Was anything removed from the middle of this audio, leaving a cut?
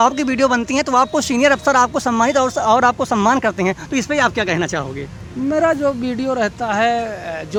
no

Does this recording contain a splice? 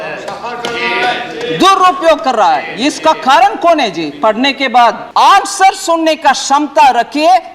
yes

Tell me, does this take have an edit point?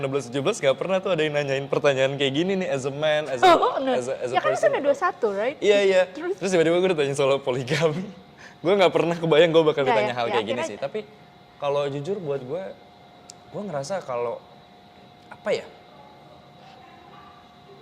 no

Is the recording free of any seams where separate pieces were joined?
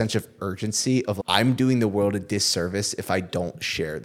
no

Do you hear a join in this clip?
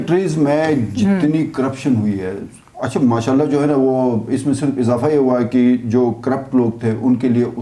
no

